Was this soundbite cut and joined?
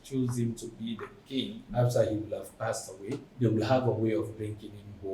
yes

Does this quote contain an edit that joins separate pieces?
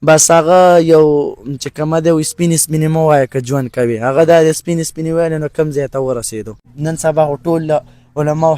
yes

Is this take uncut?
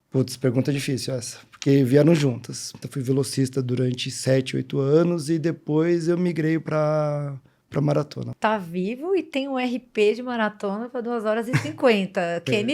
no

